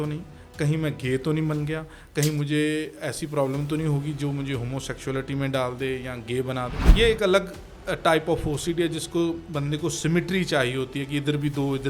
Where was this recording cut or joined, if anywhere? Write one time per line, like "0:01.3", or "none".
0:06.8

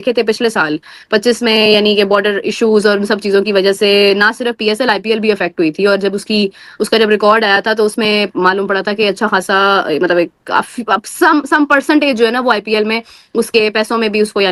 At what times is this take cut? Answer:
none

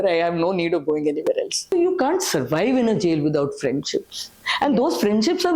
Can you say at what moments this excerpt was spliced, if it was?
0:01.7

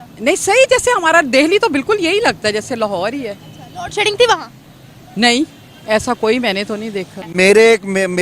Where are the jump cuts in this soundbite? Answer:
0:07.3

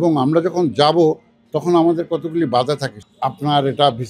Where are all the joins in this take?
0:02.9

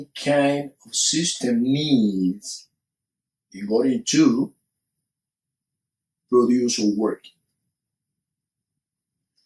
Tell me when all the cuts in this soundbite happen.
0:03.6

